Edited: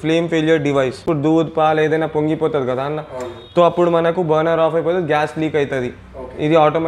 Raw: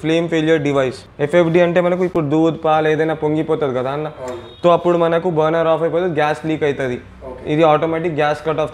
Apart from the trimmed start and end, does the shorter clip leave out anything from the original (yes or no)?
yes